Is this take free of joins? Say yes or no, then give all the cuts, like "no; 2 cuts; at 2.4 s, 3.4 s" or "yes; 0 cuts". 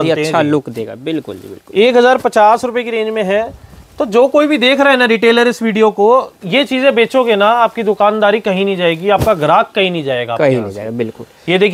yes; 0 cuts